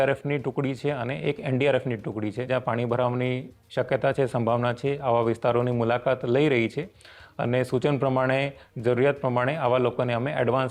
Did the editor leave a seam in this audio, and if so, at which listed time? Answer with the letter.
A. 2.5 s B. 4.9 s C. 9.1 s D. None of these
A